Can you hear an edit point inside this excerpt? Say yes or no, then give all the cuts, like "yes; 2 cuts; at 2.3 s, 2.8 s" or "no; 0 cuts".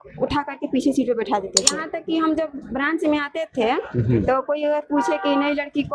yes; 1 cut; at 1.8 s